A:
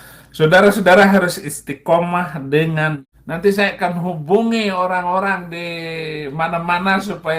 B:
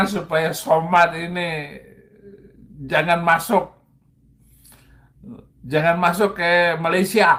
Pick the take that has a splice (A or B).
A